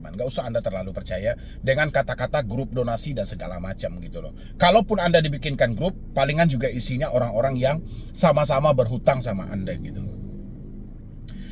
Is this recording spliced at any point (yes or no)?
no